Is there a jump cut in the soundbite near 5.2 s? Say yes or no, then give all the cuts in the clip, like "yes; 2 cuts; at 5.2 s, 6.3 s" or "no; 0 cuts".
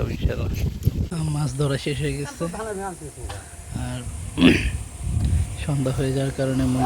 no; 1 cut; at 1.1 s